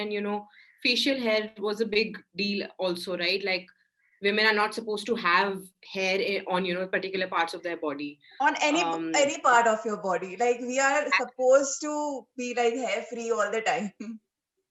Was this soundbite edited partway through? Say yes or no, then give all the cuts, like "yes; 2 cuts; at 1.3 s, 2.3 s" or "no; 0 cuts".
no; 0 cuts